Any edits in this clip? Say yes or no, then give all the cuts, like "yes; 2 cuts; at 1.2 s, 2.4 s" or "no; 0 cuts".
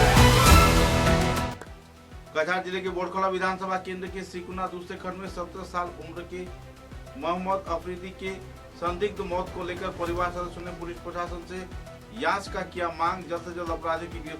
yes; 1 cut; at 1.5 s